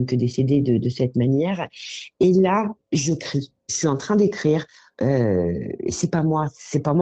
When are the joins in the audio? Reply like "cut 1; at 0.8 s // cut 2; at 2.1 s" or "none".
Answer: none